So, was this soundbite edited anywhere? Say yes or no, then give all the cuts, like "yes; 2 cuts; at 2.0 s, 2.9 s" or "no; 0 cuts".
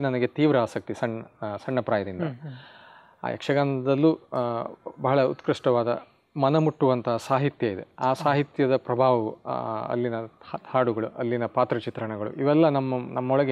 no; 0 cuts